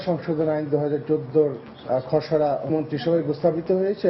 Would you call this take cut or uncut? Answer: cut